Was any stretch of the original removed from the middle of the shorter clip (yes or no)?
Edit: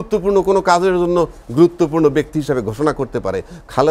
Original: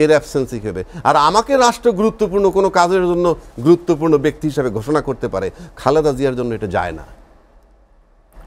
no